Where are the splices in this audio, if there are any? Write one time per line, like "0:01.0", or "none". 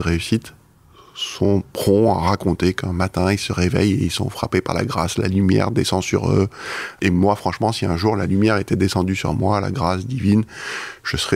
0:06.9